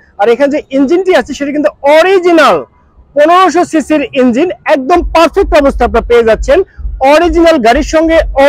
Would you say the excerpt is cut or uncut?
uncut